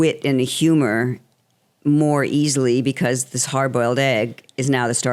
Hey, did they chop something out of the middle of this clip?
no; 0 cuts

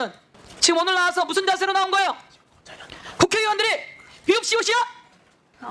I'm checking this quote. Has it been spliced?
no; 0 cuts

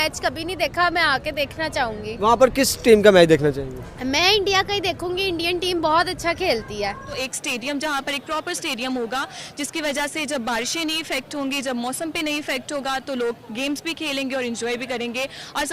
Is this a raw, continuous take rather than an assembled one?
no; 1 cut; at 7.2 s

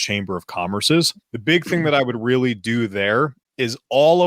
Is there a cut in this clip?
yes; 1 cut; at 1.2 s

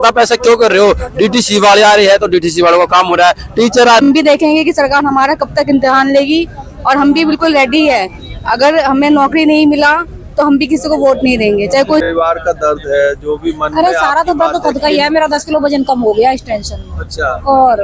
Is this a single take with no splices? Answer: no; 2 cuts; at 4.0 s, 12.0 s

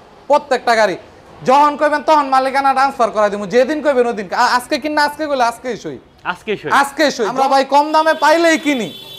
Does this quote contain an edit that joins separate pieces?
yes; 1 cut; at 7.3 s

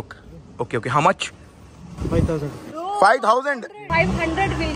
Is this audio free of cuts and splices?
yes; 0 cuts

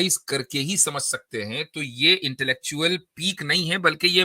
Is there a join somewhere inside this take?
no; 0 cuts

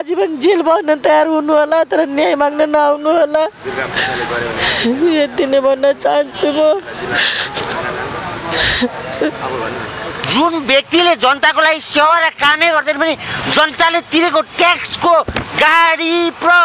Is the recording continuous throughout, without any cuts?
no; 1 cut; at 10.2 s

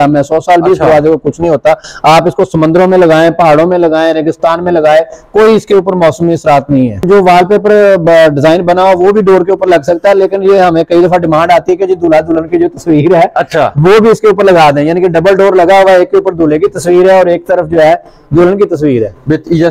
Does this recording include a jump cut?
yes; 1 cut; at 7.1 s

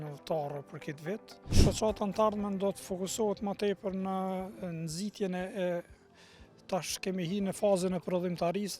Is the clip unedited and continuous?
no; 1 cut; at 1.6 s

